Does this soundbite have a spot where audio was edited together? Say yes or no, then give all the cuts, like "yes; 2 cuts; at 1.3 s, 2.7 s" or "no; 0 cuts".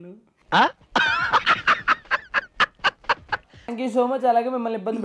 yes; 1 cut; at 3.7 s